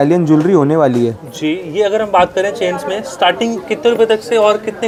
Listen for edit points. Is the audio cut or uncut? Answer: uncut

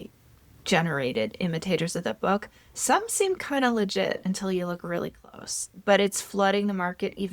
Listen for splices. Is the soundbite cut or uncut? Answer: uncut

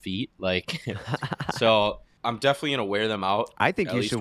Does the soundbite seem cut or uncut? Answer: cut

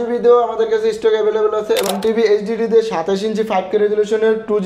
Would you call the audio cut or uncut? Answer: cut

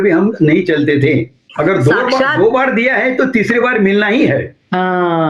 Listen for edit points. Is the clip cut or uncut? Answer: cut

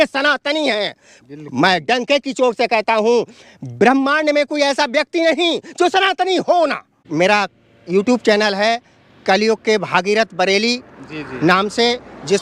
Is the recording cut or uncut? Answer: cut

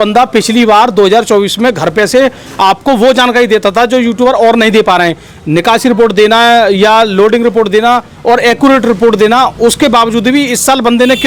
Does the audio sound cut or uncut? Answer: uncut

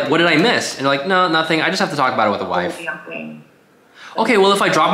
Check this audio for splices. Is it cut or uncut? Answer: uncut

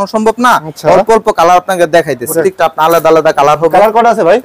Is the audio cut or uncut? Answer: cut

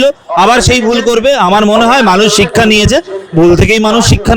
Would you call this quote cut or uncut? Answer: uncut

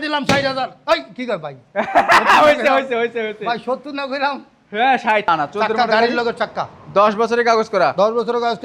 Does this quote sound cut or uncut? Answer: cut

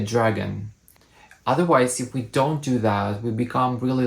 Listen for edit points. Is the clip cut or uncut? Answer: cut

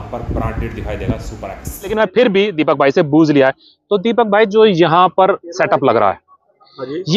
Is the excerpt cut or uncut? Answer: cut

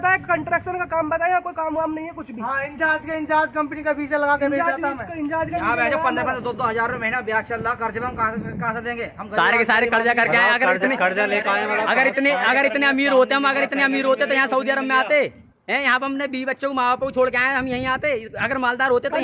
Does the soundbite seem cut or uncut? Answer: uncut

